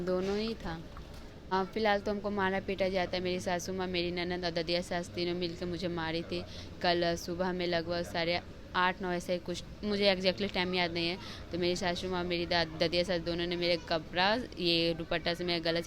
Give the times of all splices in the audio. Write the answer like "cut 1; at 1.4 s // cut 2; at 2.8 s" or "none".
cut 1; at 1.3 s